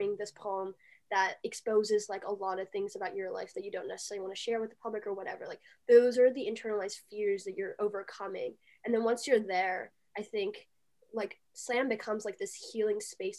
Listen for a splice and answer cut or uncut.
uncut